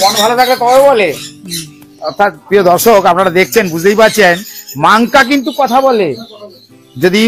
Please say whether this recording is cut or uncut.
uncut